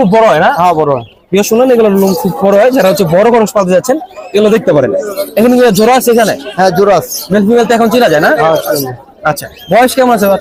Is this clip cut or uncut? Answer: uncut